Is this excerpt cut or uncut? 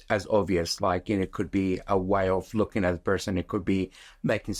uncut